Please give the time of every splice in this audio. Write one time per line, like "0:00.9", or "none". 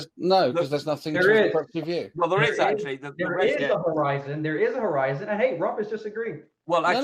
none